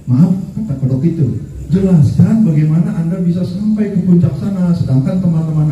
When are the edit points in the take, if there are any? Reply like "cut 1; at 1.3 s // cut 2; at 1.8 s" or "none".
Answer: cut 1; at 1.5 s